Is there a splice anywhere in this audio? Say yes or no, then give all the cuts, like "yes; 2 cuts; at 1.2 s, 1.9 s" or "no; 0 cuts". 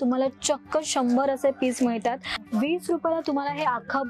yes; 1 cut; at 2.4 s